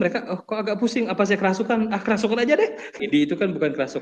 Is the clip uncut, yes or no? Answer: no